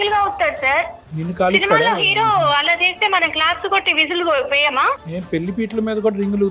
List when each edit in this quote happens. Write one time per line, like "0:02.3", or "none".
0:05.1